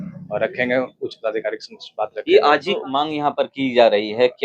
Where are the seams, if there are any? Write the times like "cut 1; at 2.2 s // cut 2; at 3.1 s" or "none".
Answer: cut 1; at 2.8 s